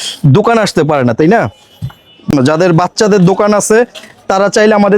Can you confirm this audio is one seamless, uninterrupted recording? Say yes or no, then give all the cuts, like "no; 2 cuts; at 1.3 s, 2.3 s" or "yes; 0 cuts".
no; 1 cut; at 2.3 s